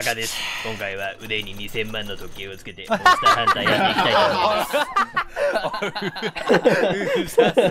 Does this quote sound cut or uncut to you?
uncut